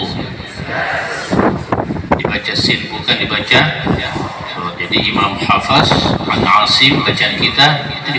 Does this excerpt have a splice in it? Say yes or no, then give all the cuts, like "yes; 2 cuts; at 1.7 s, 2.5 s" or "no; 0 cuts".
no; 0 cuts